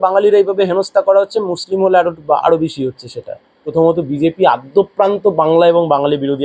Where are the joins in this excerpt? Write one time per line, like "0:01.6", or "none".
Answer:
0:03.7